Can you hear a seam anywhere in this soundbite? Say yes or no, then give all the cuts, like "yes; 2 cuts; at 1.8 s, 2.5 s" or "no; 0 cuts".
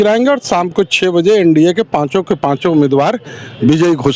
no; 0 cuts